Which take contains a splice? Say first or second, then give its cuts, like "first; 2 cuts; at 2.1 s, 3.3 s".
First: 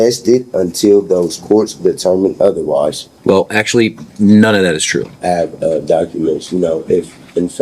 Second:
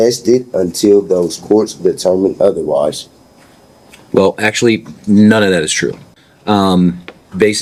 first; 2 cuts; at 3.1 s, 5.1 s